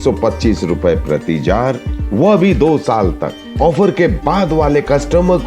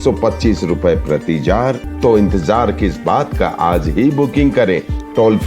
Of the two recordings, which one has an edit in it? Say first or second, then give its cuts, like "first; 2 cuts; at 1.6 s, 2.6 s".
second; 1 cut; at 1.9 s